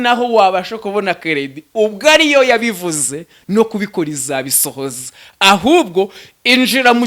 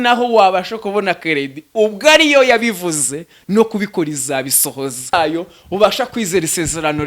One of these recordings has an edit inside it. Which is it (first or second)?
second